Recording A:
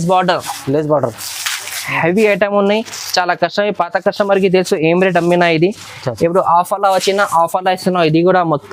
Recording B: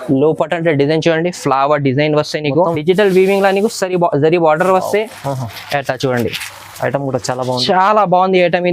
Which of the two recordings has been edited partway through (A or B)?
B